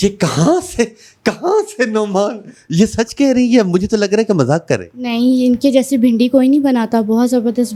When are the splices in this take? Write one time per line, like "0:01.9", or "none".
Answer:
none